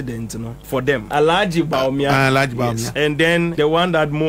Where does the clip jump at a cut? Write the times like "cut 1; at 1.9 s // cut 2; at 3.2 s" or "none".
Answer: cut 1; at 1.0 s // cut 2; at 3.4 s